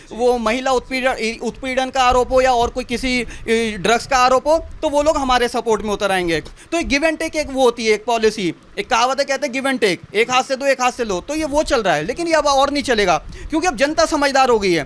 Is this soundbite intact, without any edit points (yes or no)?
yes